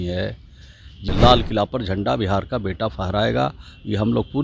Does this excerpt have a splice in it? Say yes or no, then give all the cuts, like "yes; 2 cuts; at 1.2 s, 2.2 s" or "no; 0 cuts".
yes; 1 cut; at 1.0 s